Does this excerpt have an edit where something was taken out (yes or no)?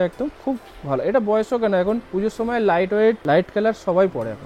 yes